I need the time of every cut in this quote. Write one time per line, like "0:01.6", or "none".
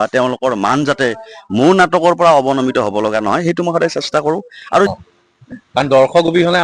0:04.9